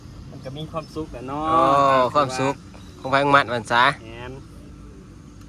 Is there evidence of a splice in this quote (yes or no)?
no